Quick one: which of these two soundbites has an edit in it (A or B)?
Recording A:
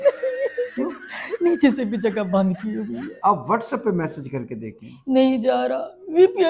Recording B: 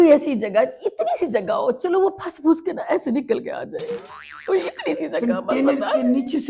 A